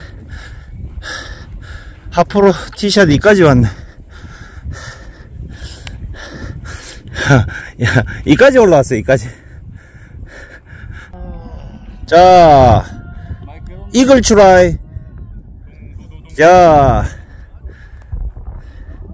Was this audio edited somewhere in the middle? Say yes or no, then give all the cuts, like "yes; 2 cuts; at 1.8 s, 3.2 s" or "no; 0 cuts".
yes; 1 cut; at 11.1 s